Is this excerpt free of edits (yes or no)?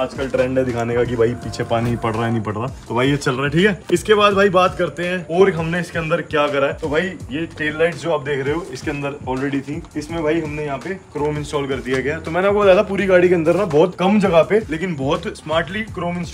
yes